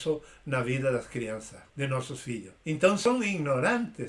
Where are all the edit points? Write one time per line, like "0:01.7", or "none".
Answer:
0:01.6
0:03.0